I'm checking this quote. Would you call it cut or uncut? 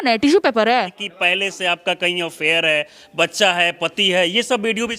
cut